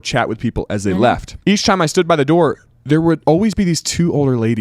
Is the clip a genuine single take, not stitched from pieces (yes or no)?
no